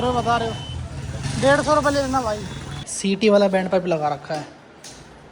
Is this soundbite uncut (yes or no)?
no